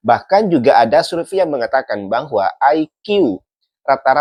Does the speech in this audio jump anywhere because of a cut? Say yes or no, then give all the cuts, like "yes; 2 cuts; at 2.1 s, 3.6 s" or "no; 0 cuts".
no; 0 cuts